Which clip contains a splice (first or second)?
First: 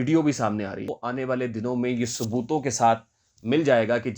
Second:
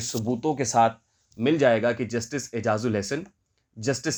first